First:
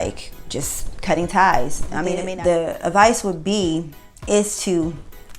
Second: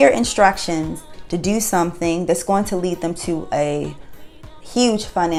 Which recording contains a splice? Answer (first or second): first